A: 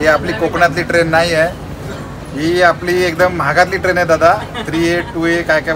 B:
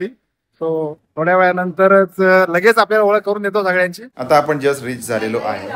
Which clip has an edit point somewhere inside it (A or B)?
B